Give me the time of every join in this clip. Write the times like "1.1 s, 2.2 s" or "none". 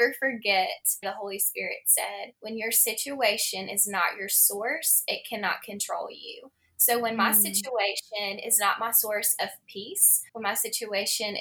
1.0 s